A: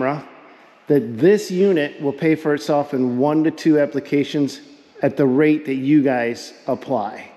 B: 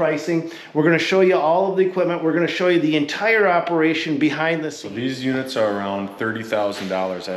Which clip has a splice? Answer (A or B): B